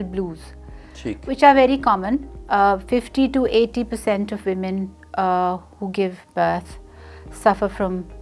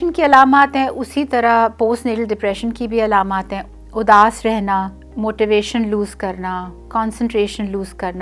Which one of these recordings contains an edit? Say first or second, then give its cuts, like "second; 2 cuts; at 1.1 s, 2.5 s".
second; 2 cuts; at 3.6 s, 5.0 s